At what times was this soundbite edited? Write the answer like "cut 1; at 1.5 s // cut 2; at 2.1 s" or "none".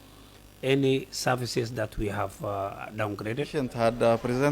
cut 1; at 3.5 s